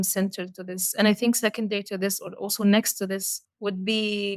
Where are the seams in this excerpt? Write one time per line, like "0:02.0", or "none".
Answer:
none

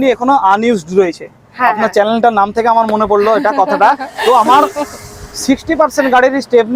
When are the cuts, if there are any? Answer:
none

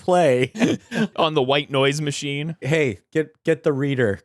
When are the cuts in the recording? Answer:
0:01.1
0:02.6

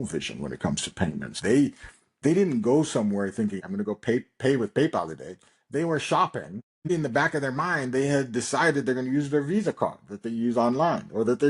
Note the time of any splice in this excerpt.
0:01.3
0:03.6
0:06.9

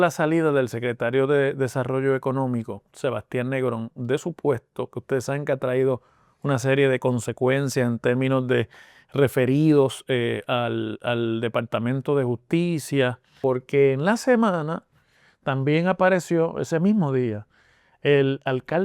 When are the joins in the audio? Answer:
0:13.3

